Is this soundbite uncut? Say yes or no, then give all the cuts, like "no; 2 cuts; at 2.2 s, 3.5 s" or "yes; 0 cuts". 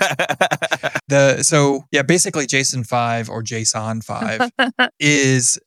no; 2 cuts; at 1.0 s, 1.8 s